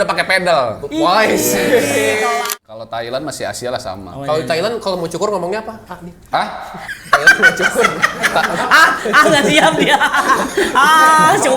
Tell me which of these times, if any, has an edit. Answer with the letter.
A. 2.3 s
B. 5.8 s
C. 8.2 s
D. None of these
A